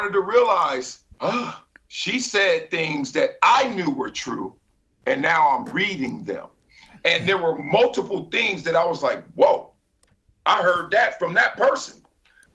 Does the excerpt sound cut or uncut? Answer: cut